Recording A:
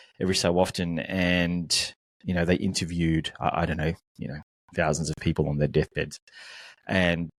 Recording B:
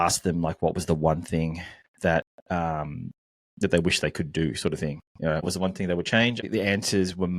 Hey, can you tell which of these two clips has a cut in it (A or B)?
B